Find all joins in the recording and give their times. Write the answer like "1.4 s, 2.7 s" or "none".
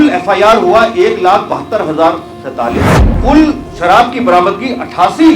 3.0 s